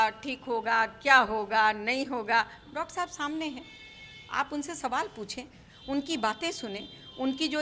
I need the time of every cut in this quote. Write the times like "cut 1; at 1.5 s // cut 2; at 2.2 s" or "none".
none